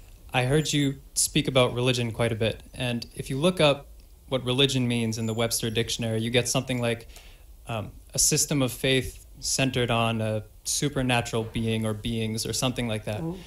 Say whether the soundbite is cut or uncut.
cut